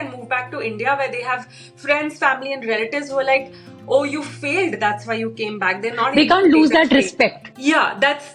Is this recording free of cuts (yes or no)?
yes